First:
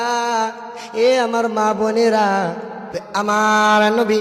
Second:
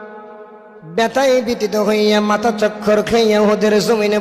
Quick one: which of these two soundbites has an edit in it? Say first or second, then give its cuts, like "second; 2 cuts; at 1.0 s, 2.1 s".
first; 1 cut; at 2.9 s